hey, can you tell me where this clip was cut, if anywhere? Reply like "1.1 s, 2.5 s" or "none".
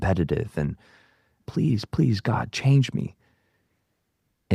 1.3 s